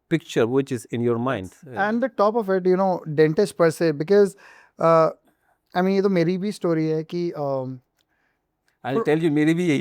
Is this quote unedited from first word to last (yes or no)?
no